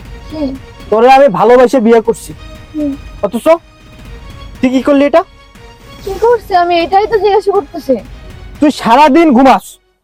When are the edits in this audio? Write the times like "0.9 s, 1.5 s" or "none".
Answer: none